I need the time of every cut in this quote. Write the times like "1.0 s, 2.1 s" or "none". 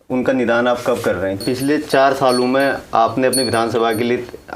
1.4 s